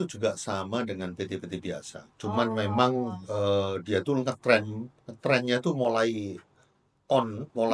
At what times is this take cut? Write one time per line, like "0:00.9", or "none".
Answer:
none